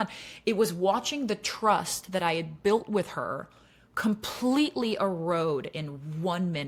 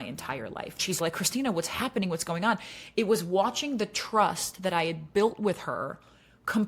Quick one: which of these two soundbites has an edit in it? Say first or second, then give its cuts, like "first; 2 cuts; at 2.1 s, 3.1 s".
second; 1 cut; at 1.0 s